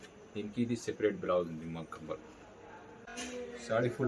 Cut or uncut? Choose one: cut